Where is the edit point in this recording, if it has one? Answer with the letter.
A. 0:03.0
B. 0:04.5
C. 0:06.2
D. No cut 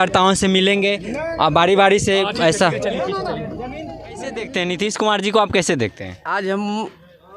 B